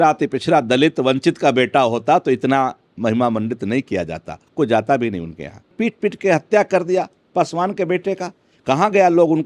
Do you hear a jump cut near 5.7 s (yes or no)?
yes